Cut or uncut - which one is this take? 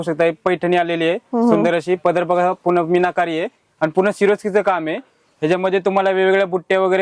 uncut